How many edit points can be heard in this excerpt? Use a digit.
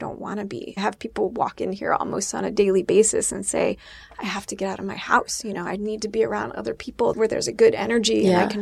2